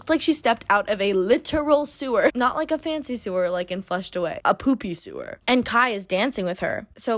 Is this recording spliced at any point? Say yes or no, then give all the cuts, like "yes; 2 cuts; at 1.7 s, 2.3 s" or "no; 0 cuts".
no; 0 cuts